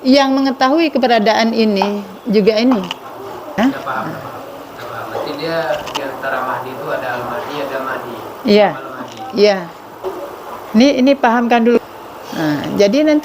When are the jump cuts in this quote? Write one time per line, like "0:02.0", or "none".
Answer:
0:12.0